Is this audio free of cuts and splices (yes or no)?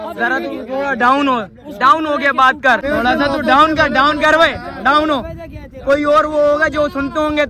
no